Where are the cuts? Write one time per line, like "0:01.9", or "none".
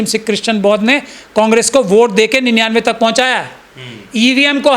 none